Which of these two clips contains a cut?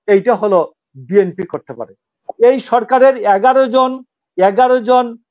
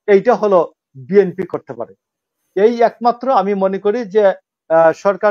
first; 1 cut; at 2.2 s

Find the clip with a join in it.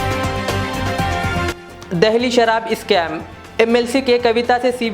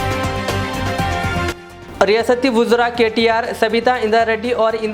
second; 1 cut; at 1.6 s

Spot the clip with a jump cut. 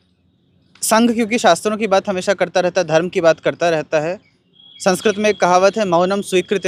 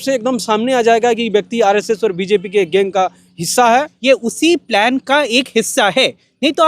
second; 1 cut; at 3.9 s

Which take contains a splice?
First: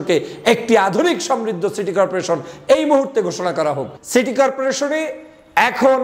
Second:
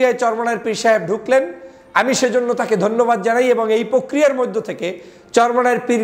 first; 1 cut; at 3.9 s

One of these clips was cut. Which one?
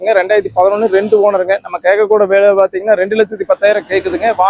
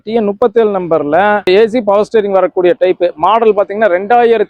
second; 1 cut; at 1.4 s

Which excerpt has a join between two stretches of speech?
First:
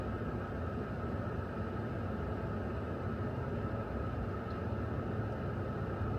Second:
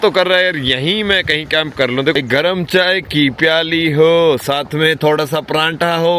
second; 1 cut; at 2.1 s

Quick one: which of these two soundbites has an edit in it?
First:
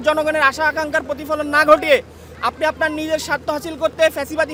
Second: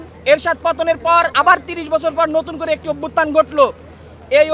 second; 1 cut; at 1.3 s

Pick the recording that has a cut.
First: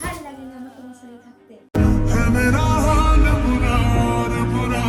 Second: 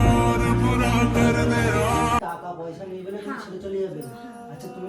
second; 1 cut; at 2.2 s

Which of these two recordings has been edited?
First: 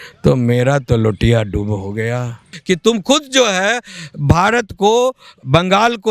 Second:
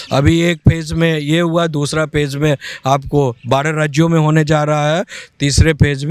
first; 1 cut; at 2.6 s

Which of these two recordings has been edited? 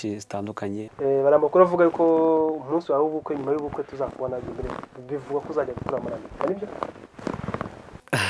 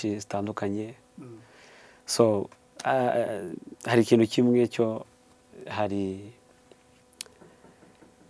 first; 1 cut; at 1.0 s

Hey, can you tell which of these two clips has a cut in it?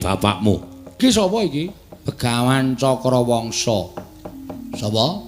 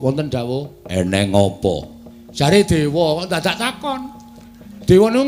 first; 1 cut; at 1.0 s

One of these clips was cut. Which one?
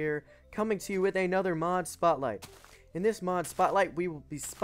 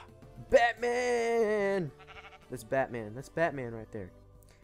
first; 1 cut; at 3.6 s

